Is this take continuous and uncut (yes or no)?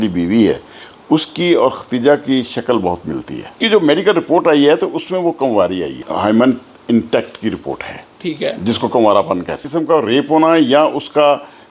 no